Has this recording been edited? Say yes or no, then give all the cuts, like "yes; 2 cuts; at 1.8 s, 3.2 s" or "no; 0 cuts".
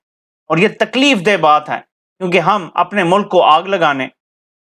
no; 0 cuts